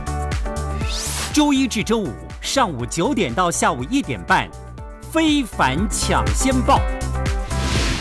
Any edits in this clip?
yes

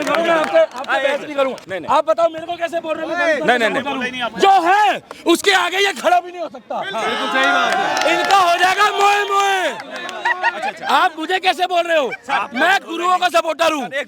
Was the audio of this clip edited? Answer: no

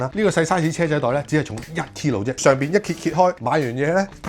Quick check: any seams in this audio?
yes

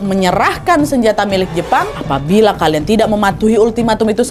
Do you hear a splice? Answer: yes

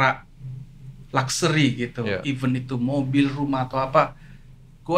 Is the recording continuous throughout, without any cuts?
yes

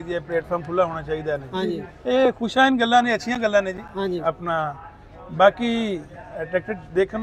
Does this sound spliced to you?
no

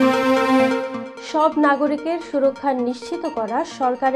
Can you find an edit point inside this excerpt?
yes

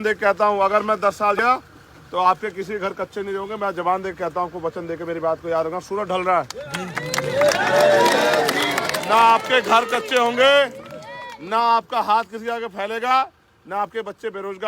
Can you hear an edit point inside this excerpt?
yes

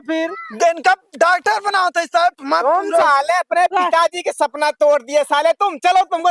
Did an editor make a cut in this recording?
no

